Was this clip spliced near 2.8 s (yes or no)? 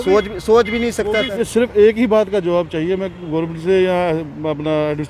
no